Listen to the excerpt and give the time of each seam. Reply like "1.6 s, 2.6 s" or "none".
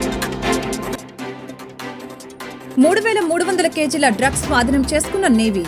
0.9 s